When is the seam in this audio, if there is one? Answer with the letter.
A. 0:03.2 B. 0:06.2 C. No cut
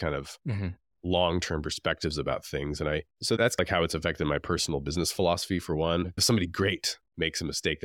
B